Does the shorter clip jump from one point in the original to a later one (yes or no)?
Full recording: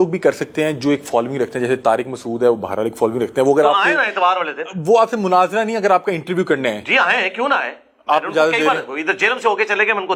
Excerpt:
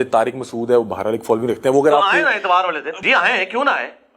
yes